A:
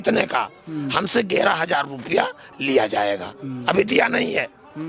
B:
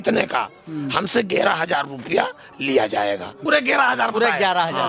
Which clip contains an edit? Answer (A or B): B